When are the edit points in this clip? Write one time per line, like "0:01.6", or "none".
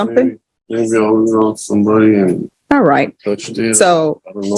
0:02.5